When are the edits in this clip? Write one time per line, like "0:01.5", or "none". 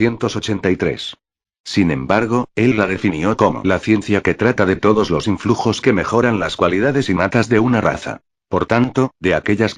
0:03.8